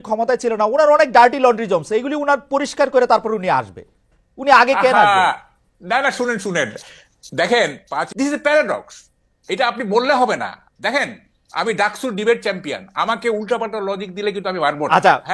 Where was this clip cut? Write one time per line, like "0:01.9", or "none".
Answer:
0:08.1